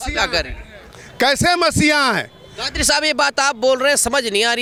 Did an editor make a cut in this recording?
no; 0 cuts

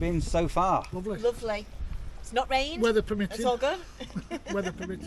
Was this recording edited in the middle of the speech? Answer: no; 0 cuts

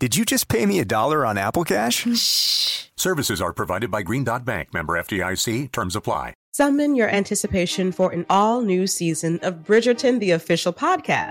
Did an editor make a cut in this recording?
yes; 1 cut; at 6.4 s

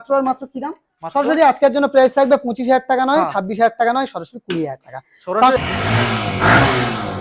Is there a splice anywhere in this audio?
yes; 1 cut; at 5.6 s

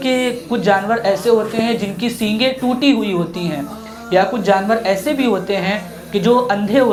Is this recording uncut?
yes; 0 cuts

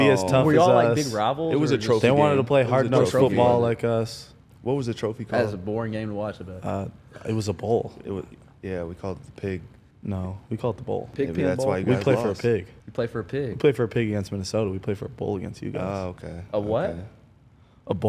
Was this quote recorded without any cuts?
yes; 0 cuts

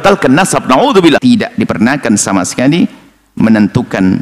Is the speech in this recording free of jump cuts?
no; 1 cut; at 1.2 s

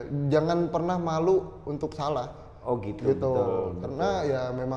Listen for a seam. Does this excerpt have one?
no; 0 cuts

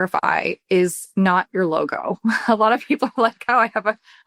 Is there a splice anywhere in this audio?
no; 0 cuts

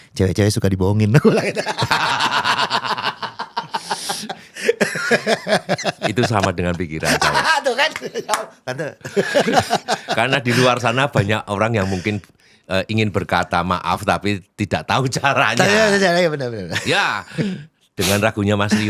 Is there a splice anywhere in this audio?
no; 0 cuts

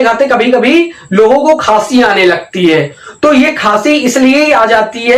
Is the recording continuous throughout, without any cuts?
yes; 0 cuts

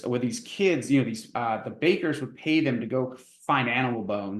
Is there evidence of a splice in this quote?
yes; 1 cut; at 1.3 s

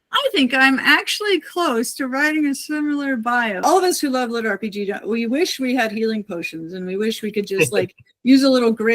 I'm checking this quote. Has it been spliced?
yes; 1 cut; at 3.6 s

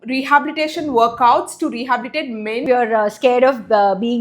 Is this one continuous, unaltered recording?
no; 1 cut; at 2.6 s

